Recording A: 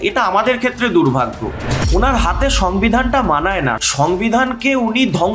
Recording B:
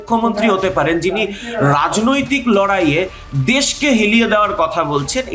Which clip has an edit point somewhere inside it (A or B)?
A